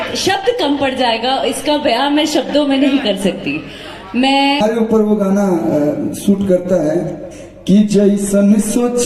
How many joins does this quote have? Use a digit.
1